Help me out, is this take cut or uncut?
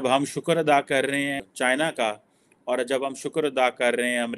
cut